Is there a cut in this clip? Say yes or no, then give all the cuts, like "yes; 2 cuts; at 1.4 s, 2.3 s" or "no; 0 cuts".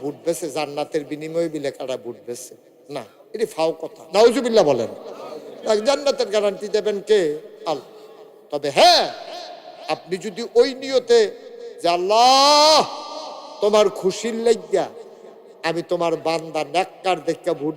no; 0 cuts